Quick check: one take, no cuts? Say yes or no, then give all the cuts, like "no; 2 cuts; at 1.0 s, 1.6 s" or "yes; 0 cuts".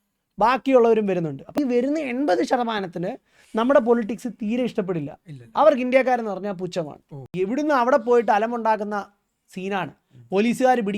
no; 2 cuts; at 1.6 s, 7.2 s